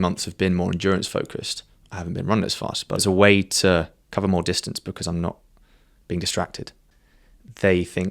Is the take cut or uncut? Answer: cut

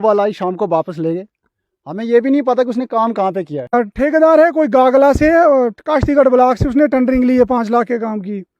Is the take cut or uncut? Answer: cut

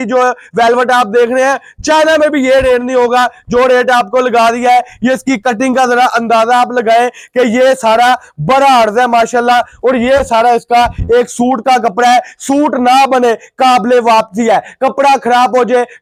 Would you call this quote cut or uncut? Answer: uncut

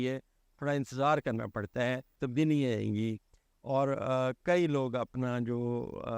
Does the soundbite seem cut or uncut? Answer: cut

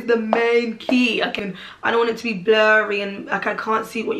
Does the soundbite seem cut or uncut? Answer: cut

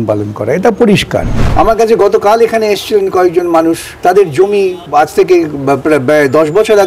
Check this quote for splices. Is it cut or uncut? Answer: cut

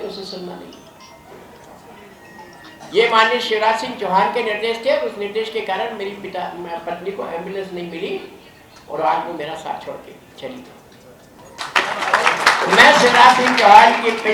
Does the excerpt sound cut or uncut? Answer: cut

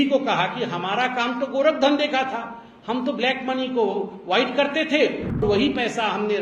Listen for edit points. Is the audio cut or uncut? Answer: cut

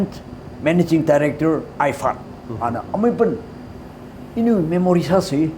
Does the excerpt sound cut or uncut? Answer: uncut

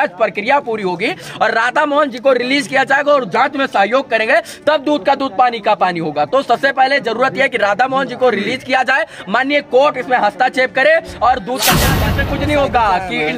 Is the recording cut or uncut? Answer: cut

